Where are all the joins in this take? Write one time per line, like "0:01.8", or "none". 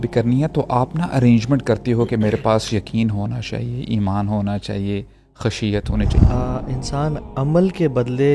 0:06.2